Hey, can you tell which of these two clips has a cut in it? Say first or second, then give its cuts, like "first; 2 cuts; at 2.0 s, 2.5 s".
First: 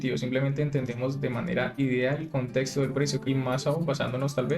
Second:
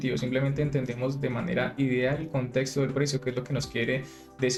first; 1 cut; at 3.2 s